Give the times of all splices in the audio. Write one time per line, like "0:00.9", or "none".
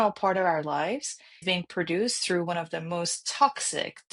0:01.4